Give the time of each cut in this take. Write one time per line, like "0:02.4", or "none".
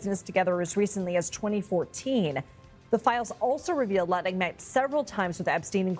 none